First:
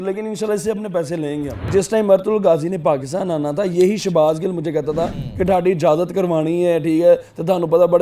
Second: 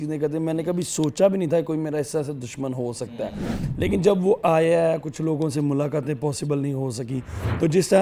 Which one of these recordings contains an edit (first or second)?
first